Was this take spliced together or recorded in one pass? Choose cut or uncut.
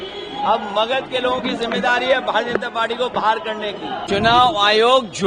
cut